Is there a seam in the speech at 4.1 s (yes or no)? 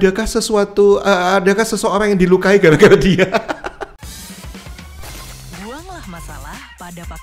yes